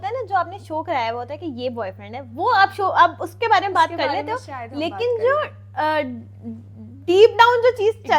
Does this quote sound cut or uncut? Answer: uncut